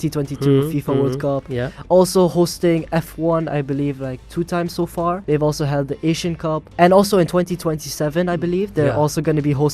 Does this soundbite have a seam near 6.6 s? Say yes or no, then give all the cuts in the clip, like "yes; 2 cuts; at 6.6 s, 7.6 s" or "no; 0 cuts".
yes; 2 cuts; at 5.2 s, 6.6 s